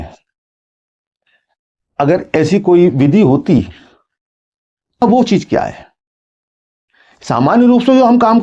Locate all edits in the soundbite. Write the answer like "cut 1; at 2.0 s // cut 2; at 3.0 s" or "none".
cut 1; at 5.0 s